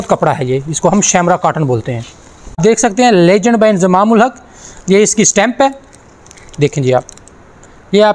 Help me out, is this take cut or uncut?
cut